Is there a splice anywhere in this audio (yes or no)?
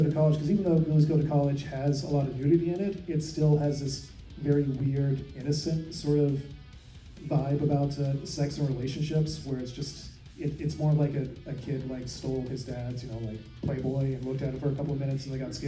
no